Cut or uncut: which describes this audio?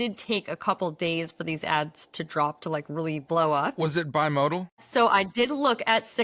cut